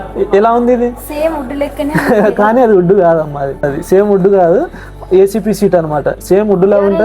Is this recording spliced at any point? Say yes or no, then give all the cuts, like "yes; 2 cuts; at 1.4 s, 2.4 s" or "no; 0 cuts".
yes; 1 cut; at 3.7 s